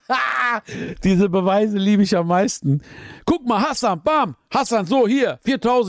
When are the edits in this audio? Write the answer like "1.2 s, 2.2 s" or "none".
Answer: none